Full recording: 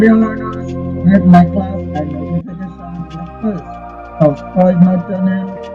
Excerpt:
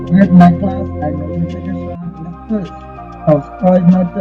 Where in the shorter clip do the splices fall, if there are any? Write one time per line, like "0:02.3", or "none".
none